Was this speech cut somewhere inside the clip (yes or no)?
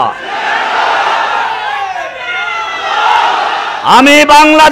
yes